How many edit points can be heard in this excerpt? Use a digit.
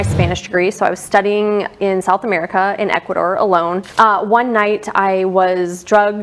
1